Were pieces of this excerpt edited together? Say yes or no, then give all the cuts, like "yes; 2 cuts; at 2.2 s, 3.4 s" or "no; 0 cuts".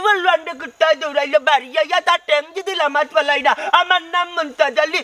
no; 0 cuts